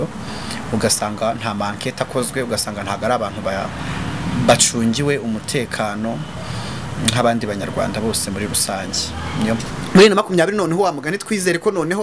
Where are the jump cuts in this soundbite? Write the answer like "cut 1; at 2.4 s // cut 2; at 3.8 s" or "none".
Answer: cut 1; at 9.7 s

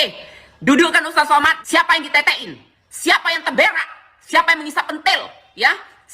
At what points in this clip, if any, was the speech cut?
cut 1; at 1.6 s

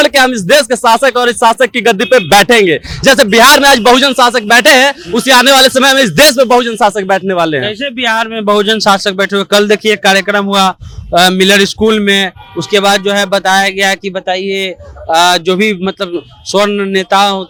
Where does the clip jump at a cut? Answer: none

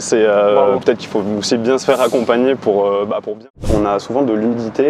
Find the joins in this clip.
cut 1; at 3.6 s

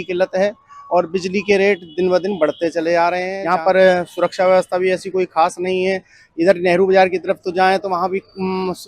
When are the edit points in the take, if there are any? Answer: cut 1; at 3.3 s

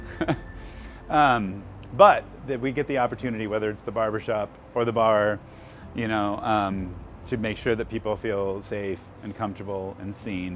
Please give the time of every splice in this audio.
none

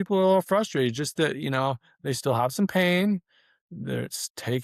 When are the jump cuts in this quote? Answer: none

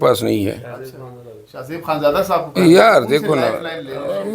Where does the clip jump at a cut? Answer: none

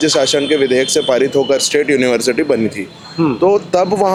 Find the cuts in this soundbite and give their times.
none

